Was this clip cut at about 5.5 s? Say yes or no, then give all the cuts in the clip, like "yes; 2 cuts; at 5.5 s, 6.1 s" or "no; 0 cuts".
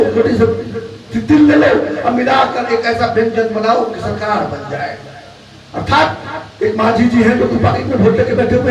no; 0 cuts